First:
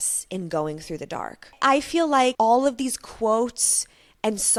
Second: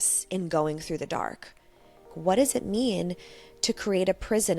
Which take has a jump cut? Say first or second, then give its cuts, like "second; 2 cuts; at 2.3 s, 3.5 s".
second; 1 cut; at 1.6 s